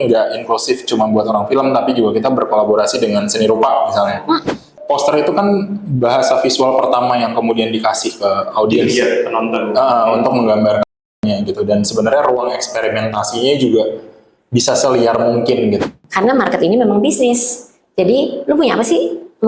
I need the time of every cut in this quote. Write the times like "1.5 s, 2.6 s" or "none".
4.8 s, 15.8 s